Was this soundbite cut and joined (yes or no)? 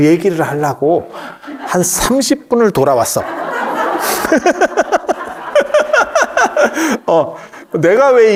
no